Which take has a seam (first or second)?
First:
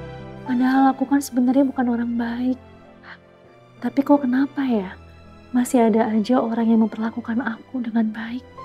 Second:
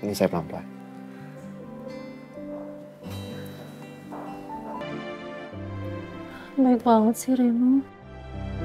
second